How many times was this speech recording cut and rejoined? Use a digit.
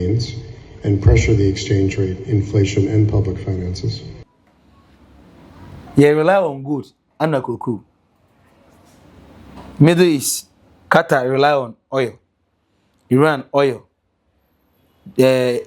1